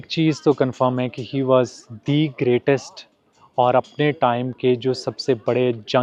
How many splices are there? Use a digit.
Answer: 0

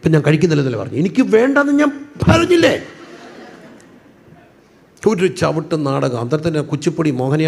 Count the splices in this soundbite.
0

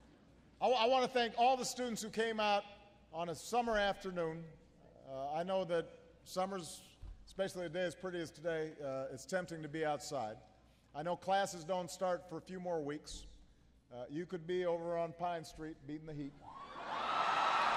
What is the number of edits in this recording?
0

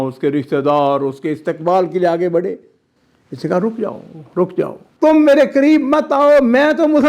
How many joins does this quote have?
1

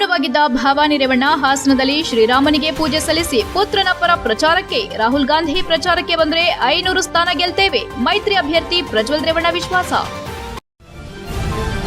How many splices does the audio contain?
1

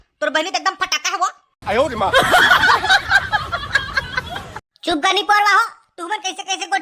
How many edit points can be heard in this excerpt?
0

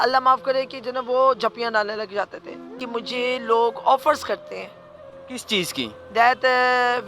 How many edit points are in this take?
1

